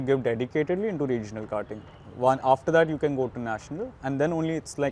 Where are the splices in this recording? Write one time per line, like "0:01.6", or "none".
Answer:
none